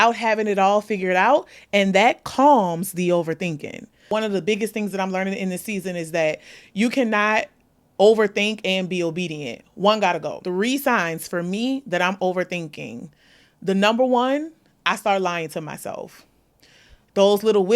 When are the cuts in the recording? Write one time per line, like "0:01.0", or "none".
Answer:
0:04.1
0:10.4